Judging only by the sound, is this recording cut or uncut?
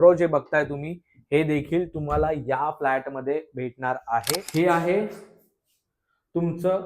cut